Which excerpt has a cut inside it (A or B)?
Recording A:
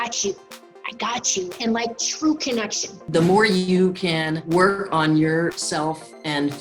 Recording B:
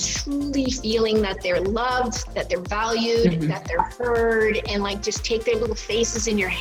A